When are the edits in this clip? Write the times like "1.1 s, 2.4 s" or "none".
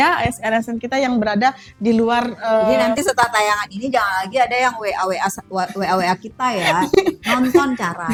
none

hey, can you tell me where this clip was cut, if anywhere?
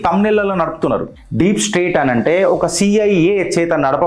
1.2 s

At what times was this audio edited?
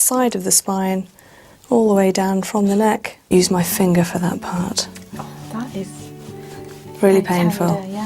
3.3 s

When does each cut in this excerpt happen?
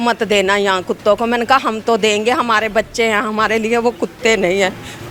none

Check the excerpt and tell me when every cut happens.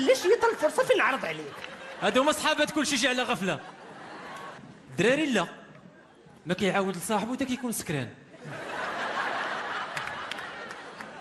4.6 s

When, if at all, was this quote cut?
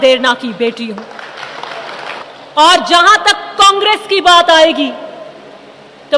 2.2 s

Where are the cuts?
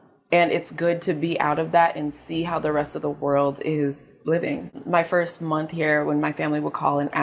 4.8 s

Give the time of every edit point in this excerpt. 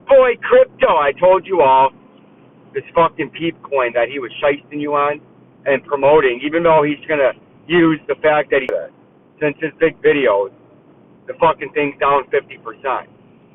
8.7 s

